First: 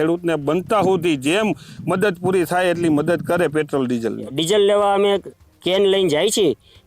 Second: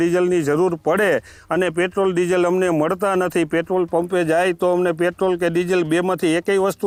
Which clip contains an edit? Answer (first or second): first